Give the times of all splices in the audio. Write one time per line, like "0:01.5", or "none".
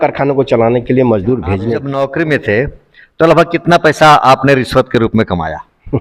0:01.8